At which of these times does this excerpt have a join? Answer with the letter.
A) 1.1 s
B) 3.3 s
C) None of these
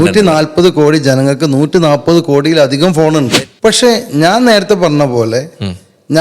B